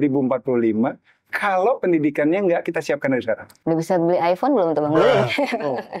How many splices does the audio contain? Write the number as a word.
one